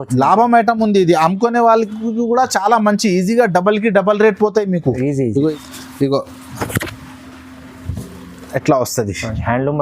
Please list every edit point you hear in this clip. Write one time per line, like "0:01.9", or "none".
0:05.5